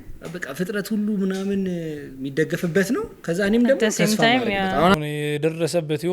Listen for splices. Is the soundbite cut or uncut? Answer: cut